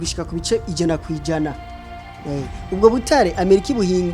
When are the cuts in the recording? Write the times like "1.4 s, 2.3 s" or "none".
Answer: none

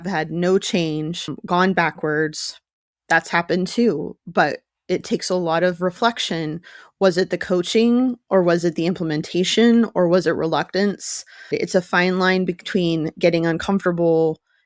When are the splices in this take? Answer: 1.3 s, 11.5 s

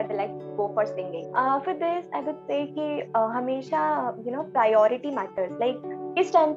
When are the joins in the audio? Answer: 1.2 s

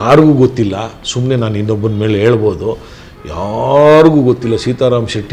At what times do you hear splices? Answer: none

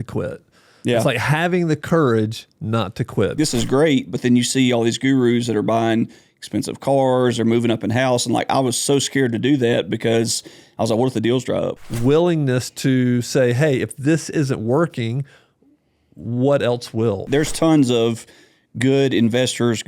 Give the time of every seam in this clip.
3.3 s, 11.8 s, 17.2 s

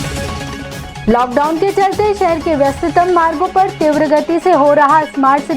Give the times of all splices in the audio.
0.9 s

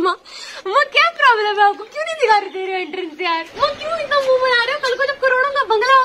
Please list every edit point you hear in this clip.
3.5 s

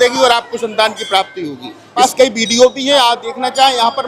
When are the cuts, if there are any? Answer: 2.0 s

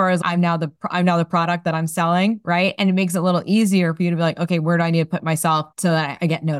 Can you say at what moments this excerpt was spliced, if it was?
5.7 s

